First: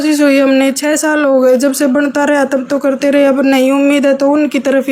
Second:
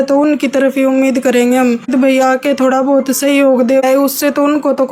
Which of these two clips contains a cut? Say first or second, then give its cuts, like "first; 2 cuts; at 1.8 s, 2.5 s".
second; 2 cuts; at 1.9 s, 3.8 s